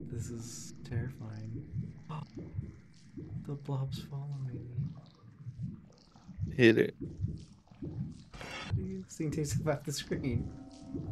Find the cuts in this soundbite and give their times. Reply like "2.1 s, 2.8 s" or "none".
8.7 s